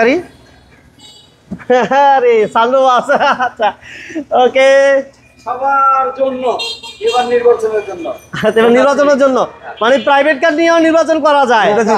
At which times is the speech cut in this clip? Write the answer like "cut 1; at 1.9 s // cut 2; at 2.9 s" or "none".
none